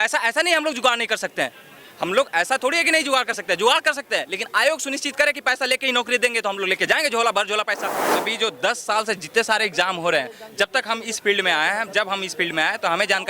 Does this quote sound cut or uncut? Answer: cut